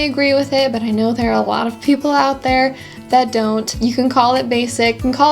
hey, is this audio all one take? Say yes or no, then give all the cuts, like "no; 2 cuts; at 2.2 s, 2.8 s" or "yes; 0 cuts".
no; 1 cut; at 3.7 s